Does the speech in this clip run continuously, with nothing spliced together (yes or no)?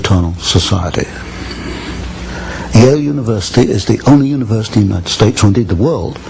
no